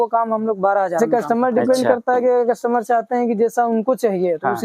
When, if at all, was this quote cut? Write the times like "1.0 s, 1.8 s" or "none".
1.0 s

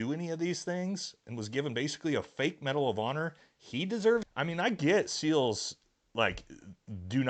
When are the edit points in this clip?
4.3 s

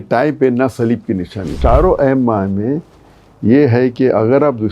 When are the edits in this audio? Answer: 1.6 s

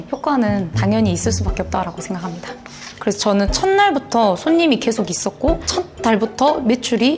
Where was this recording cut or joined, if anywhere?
2.9 s

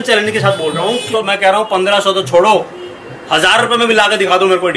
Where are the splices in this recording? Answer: 1.1 s

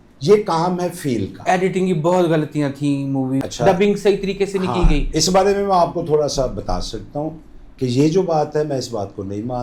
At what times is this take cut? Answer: 3.4 s

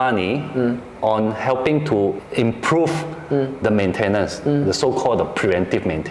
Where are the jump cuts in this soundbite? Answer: 2.2 s

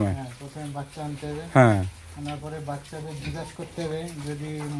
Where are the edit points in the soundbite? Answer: none

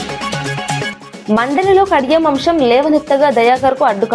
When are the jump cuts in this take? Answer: 0.9 s

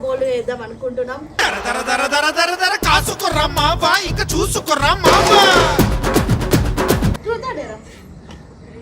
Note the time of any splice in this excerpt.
7.2 s

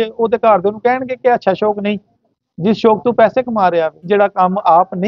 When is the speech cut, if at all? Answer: 4.0 s

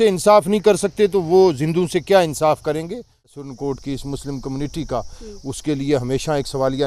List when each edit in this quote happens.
3.4 s

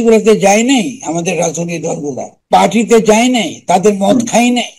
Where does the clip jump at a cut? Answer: 2.3 s

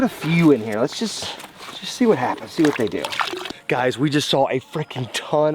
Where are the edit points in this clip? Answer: 3.4 s

